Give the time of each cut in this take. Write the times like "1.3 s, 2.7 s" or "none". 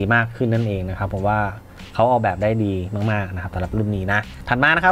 none